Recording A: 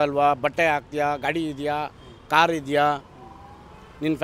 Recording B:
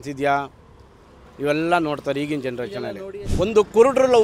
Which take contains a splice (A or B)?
B